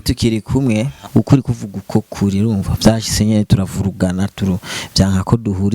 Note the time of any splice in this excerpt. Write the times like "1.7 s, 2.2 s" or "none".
1.0 s